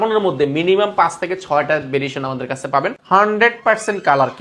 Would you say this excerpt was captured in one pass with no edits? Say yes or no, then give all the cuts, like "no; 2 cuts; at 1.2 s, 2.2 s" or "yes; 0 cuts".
no; 1 cut; at 3.0 s